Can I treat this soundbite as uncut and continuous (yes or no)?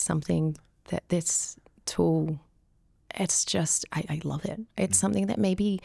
yes